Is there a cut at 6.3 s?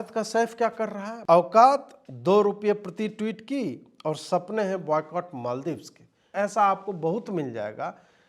yes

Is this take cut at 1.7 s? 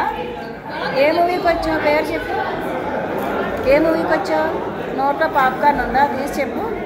no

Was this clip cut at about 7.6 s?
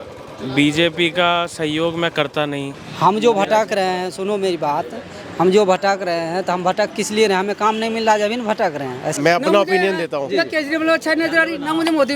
no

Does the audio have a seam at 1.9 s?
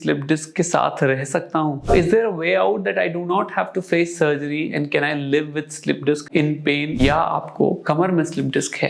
yes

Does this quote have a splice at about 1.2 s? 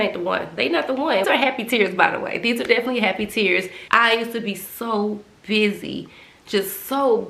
yes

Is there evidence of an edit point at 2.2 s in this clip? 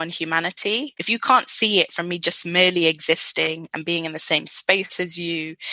no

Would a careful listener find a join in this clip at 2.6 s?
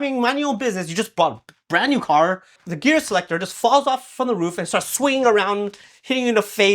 yes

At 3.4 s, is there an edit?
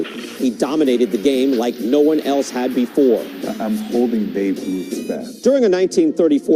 yes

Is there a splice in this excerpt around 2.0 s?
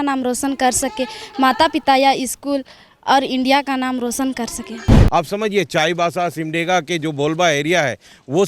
no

